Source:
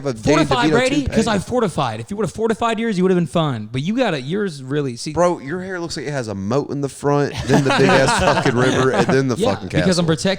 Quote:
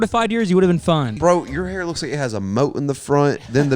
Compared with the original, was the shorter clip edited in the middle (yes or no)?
yes